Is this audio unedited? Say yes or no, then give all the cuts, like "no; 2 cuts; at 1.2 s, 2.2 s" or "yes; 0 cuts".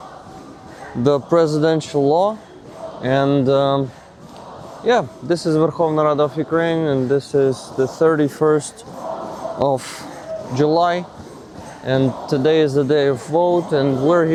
yes; 0 cuts